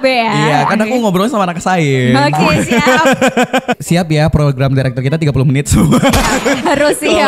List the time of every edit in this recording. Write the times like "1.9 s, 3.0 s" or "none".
3.8 s